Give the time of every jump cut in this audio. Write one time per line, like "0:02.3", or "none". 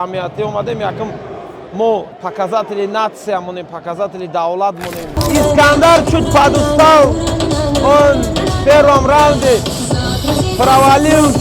0:02.2
0:05.2